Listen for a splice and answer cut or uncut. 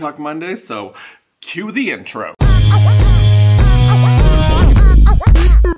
uncut